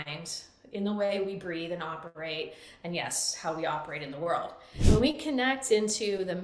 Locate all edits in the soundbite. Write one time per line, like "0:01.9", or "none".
0:04.8